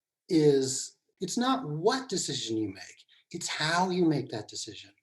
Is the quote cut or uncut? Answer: cut